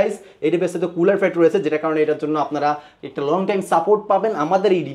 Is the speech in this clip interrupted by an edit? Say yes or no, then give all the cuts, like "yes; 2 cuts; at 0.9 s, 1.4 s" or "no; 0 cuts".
no; 0 cuts